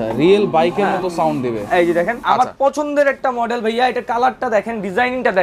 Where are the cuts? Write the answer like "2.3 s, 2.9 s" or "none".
2.2 s

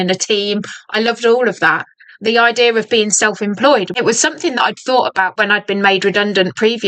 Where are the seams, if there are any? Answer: 3.9 s, 5.3 s

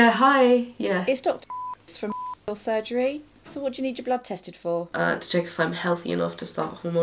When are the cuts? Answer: 1.0 s, 3.4 s, 4.8 s

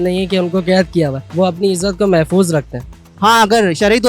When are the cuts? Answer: 1.2 s, 3.0 s

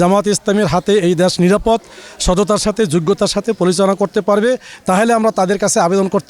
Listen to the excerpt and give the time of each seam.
none

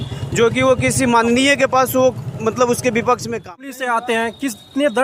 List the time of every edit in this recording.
3.7 s

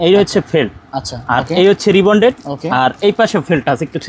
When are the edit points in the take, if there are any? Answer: none

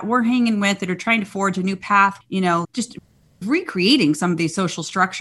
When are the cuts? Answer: 2.3 s

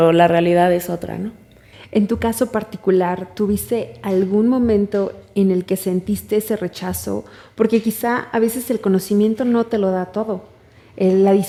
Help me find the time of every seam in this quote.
none

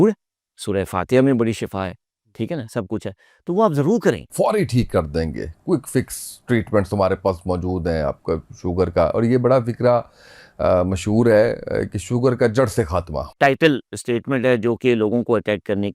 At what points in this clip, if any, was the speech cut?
4.3 s, 13.3 s

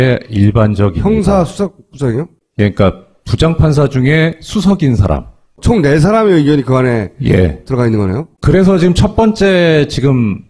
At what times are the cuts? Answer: none

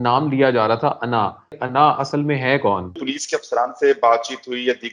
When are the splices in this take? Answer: 1.6 s, 3.0 s

